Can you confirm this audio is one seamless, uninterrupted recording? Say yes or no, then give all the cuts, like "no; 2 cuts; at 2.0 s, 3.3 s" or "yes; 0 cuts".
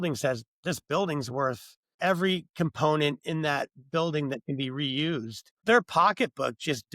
no; 2 cuts; at 1.9 s, 5.6 s